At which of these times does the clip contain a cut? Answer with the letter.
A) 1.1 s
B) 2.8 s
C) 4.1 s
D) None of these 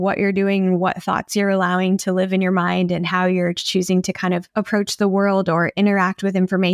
D